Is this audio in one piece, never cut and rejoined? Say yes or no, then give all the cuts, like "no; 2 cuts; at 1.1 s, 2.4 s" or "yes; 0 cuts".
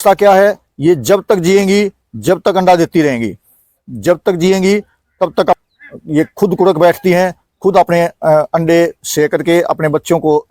no; 1 cut; at 5.6 s